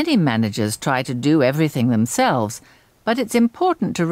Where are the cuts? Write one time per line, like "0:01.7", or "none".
0:02.5